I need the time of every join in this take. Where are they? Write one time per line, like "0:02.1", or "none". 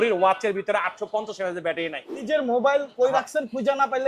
0:02.2